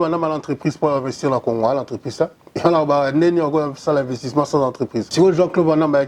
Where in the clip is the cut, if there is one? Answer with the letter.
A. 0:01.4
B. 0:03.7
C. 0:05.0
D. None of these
C